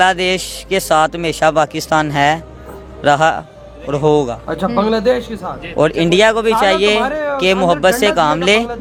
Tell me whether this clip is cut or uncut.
uncut